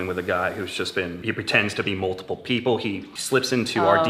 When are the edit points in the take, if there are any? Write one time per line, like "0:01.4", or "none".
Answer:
0:01.2
0:03.1